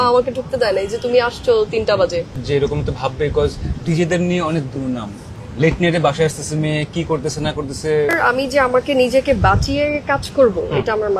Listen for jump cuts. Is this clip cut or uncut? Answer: cut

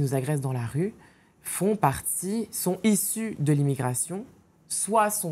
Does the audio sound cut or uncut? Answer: uncut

